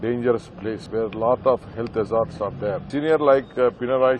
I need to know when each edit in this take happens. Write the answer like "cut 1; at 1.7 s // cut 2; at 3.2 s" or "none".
cut 1; at 0.8 s // cut 2; at 2.9 s